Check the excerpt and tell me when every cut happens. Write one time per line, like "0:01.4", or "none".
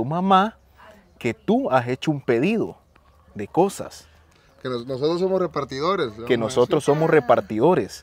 none